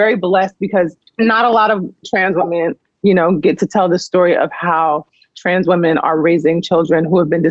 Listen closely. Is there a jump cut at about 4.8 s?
no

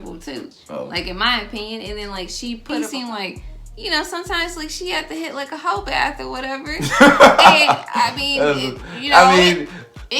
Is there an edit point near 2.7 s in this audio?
yes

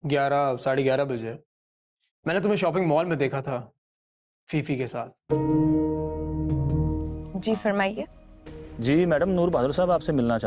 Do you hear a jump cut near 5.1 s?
no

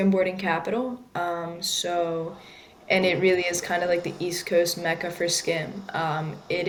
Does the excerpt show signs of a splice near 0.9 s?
no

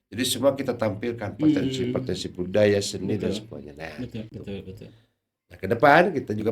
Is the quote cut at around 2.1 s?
no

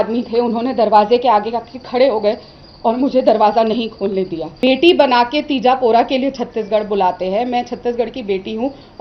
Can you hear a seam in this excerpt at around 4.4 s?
yes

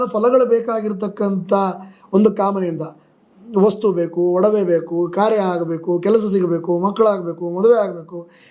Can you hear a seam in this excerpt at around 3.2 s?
no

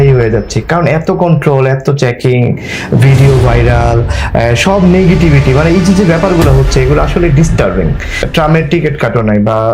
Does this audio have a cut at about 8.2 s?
yes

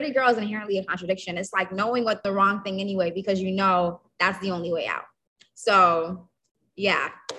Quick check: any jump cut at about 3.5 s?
no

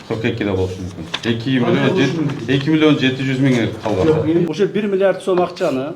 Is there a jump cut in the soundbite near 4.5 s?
yes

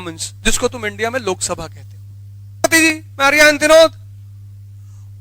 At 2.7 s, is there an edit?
yes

